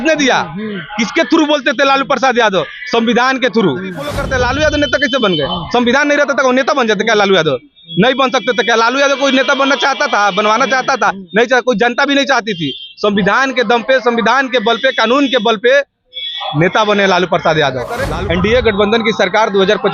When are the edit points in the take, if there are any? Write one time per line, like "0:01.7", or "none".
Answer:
0:04.2
0:18.1

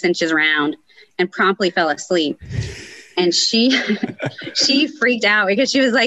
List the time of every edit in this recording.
none

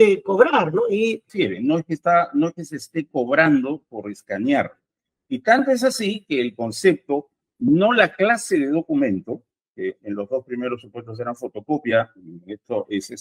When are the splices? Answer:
0:01.3

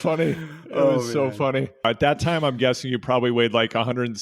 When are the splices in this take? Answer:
0:01.8

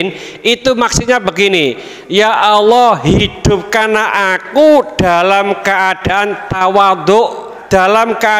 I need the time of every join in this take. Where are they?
0:07.5

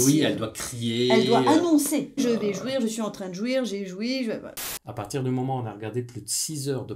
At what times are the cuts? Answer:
0:02.2
0:04.5

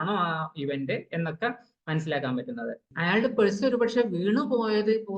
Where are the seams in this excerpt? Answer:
0:02.9

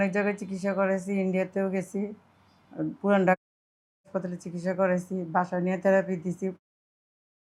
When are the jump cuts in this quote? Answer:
none

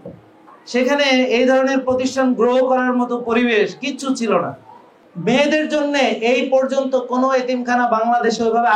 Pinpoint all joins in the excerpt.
0:05.1

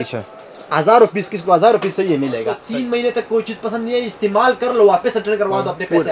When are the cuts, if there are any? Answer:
0:02.6

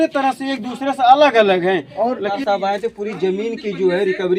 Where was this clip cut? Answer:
0:02.4

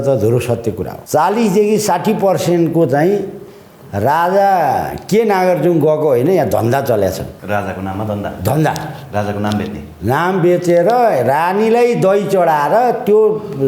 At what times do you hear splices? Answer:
0:00.9
0:07.3

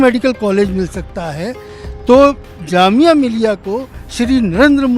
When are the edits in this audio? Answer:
none

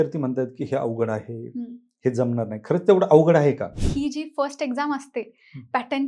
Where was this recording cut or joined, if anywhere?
0:03.8

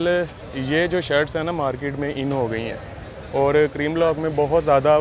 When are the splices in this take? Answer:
none

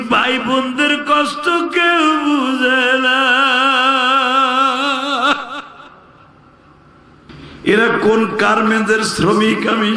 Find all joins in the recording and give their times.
0:07.3

